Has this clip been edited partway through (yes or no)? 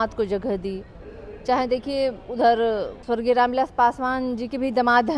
yes